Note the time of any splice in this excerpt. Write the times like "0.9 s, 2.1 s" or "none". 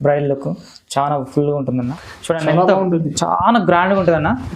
2.0 s